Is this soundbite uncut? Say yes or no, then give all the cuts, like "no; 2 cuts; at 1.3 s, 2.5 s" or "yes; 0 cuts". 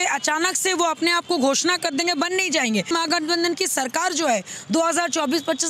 no; 1 cut; at 2.9 s